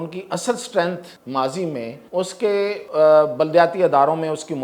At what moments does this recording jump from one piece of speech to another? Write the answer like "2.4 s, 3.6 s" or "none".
1.1 s, 2.0 s, 2.8 s